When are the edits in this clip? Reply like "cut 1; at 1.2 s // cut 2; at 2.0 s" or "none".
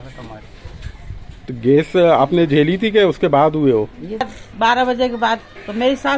cut 1; at 4.2 s